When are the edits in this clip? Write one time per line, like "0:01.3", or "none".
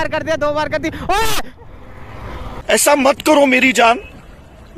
none